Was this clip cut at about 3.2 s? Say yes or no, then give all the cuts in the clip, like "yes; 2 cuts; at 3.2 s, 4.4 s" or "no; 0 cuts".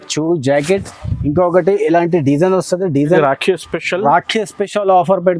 yes; 1 cut; at 3.2 s